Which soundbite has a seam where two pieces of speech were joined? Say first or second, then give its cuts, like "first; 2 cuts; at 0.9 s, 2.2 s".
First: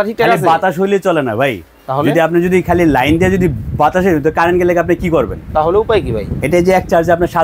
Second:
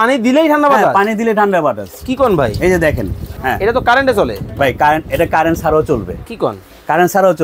second; 1 cut; at 3.2 s